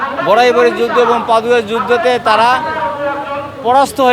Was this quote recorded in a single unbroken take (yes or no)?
yes